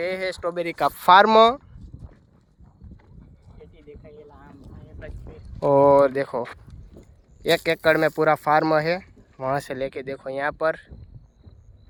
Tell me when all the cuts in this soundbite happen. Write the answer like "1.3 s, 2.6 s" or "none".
none